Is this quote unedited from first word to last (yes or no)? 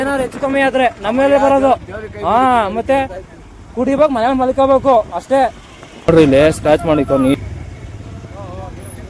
yes